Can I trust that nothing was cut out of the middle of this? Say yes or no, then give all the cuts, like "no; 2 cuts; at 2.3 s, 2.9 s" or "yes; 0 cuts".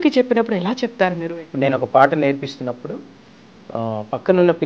no; 1 cut; at 1.3 s